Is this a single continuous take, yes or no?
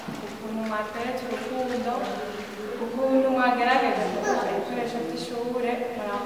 yes